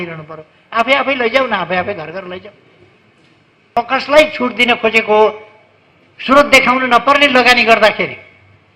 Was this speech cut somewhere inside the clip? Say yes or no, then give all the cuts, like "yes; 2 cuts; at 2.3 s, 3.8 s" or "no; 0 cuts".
yes; 1 cut; at 3.7 s